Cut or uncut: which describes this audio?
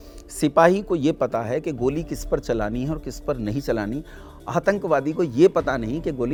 uncut